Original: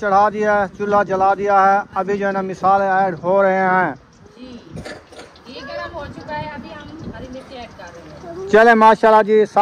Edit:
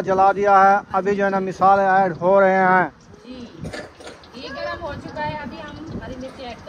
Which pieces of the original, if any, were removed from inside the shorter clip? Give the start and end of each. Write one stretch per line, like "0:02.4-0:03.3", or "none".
0:03.9-0:04.0